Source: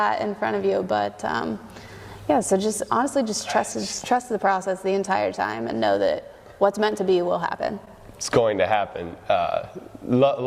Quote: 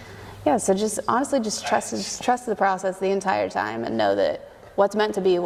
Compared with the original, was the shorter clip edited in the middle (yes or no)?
no